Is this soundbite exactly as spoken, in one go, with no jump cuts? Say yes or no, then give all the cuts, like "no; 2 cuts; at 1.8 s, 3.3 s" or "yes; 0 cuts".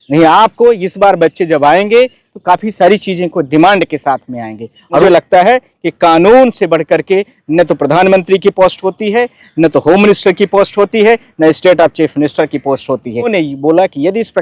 no; 2 cuts; at 5.0 s, 13.3 s